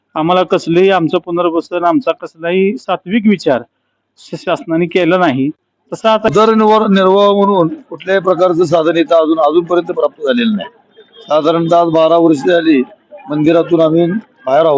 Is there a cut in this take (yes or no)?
yes